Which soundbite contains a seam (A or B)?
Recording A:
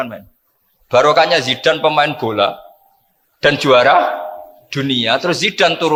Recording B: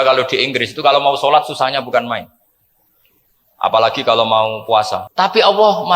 B